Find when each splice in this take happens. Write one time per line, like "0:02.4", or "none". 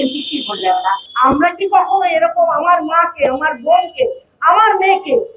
0:01.1